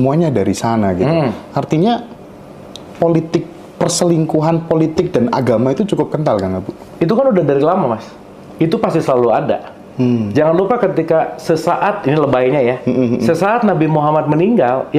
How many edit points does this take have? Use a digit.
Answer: 0